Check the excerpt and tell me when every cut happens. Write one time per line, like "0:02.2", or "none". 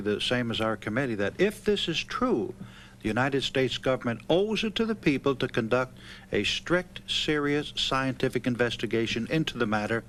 none